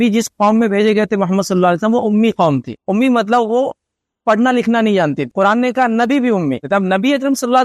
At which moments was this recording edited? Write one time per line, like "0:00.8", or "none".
0:02.7
0:05.2
0:06.6